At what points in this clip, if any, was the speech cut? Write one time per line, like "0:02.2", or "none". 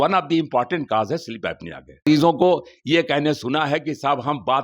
0:02.0